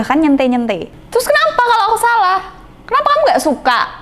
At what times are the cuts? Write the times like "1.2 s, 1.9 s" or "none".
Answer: 0.9 s

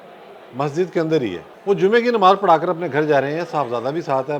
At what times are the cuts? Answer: 1.5 s

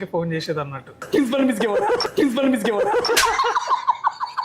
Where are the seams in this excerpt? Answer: 1.0 s, 3.1 s

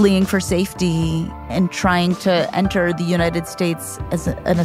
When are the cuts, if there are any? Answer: 1.4 s

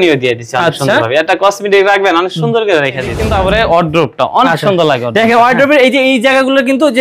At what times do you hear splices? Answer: 3.2 s

